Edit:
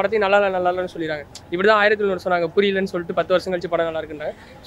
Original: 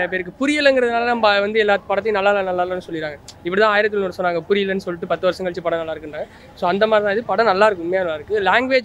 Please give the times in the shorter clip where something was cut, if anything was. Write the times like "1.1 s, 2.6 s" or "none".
none